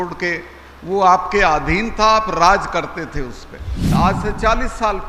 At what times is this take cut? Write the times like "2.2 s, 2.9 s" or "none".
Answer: 3.8 s